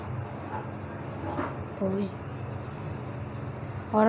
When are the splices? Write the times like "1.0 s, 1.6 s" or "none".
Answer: 2.1 s